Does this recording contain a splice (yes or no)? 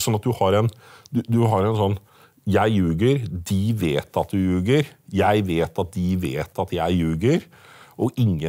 no